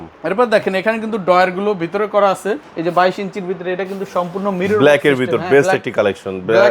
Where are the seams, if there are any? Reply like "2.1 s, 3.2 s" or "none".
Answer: 2.6 s